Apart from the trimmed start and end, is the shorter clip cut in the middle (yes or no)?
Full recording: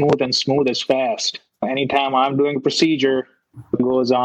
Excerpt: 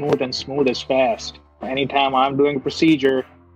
no